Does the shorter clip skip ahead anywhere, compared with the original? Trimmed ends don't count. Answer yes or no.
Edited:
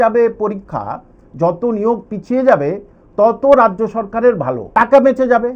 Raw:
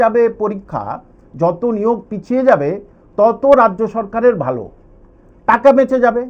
yes